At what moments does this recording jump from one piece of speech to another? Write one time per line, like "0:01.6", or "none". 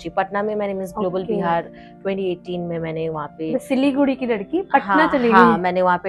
none